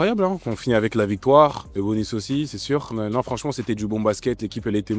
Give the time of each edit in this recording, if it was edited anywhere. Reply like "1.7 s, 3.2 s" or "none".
1.6 s, 2.9 s

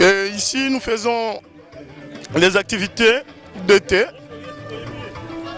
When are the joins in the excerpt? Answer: none

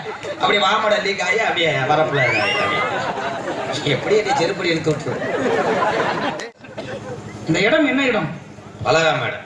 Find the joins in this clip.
6.4 s

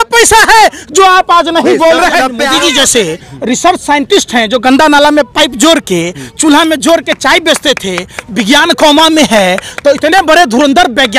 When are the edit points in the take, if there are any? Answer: 2.4 s

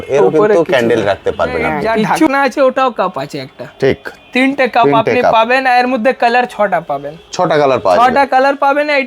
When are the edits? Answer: 2.3 s

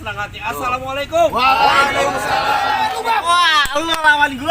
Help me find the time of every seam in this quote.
2.8 s

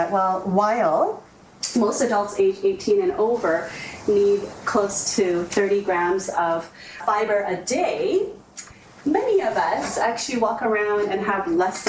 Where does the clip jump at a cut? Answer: none

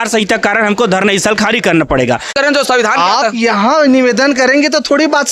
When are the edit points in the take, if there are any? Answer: 2.3 s

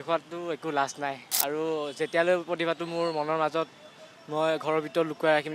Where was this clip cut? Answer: 1.3 s

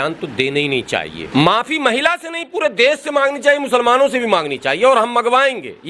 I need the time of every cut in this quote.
1.2 s

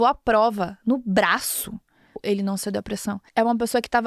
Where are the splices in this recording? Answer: 2.2 s, 3.2 s

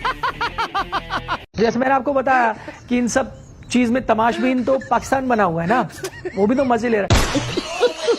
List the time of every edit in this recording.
1.4 s

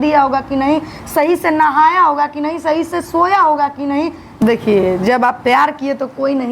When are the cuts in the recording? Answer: 4.4 s

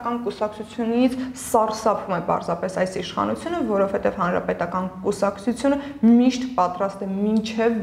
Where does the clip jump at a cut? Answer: none

